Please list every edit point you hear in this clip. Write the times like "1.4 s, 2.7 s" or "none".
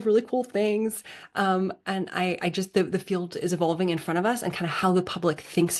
none